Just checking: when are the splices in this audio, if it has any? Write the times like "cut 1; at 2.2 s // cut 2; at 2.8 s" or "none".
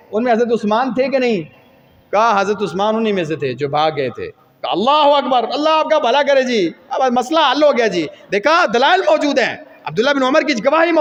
none